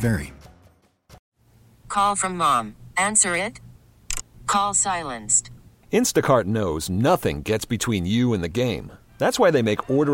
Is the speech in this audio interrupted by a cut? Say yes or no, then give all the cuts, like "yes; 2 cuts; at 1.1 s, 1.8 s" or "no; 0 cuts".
yes; 1 cut; at 1.3 s